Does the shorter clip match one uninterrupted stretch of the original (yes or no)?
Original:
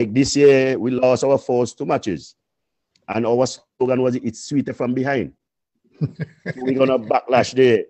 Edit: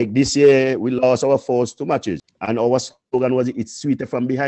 no